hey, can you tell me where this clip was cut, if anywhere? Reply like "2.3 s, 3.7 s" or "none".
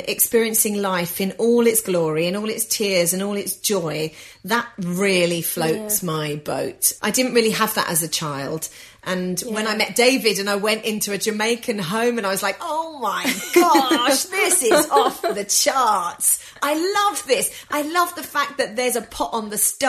6.8 s, 9.0 s

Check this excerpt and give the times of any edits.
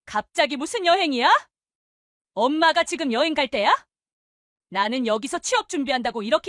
none

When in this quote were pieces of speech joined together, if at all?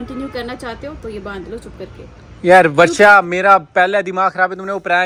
none

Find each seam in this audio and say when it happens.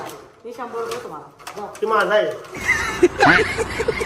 2.8 s

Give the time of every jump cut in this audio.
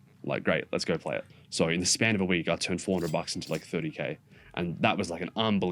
1.4 s

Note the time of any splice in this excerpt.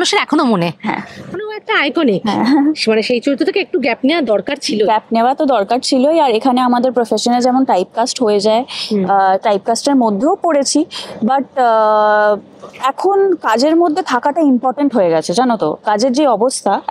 none

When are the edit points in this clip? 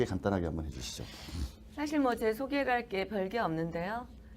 2.5 s

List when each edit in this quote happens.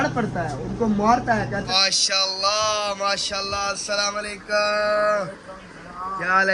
1.7 s

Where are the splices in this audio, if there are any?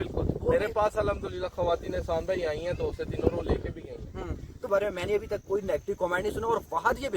4.7 s

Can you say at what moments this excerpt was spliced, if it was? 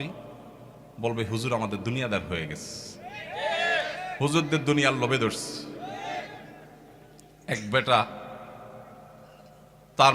none

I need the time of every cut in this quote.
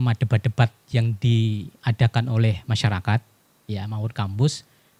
none

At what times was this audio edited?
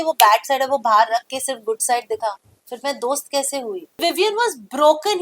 4.0 s

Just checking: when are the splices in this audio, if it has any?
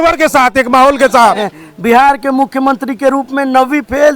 1.5 s

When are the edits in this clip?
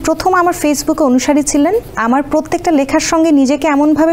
1.9 s

